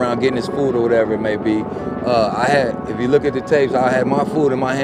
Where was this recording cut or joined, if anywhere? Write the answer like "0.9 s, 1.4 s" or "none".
none